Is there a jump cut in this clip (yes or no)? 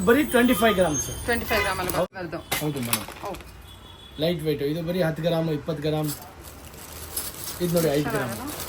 yes